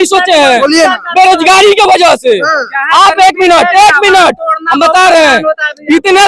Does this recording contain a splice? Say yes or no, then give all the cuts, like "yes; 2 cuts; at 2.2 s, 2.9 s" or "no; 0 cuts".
no; 0 cuts